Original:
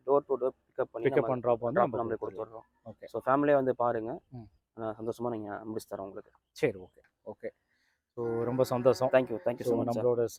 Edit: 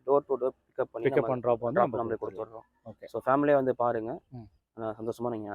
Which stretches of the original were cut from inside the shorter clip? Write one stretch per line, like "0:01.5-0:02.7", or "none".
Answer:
none